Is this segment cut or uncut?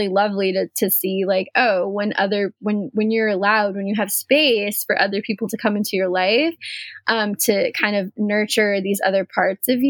uncut